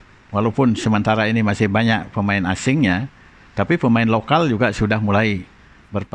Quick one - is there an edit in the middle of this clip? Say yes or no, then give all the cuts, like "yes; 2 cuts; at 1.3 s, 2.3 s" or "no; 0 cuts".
no; 0 cuts